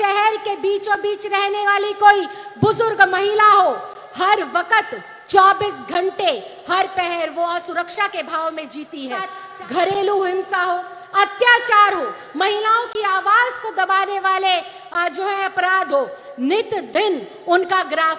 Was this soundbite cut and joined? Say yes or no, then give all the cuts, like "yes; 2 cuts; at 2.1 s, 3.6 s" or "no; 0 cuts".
yes; 1 cut; at 9.4 s